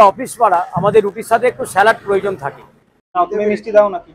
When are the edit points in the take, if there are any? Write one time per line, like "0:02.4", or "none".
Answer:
0:03.2

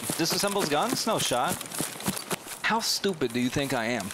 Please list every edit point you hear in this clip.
0:02.5

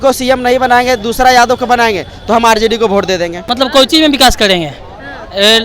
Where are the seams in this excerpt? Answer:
0:03.4

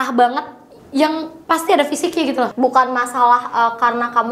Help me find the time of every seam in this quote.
0:01.3
0:02.5

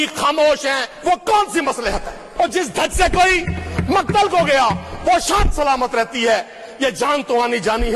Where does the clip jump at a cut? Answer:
0:00.9
0:02.2

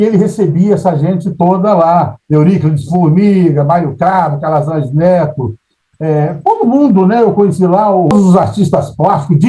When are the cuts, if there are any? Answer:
0:08.1

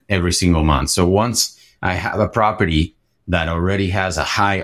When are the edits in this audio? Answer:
none

